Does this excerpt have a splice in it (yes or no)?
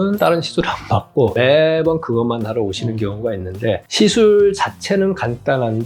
yes